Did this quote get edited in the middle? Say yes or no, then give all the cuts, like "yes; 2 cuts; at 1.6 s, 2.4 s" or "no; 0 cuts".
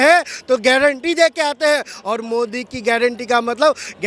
no; 0 cuts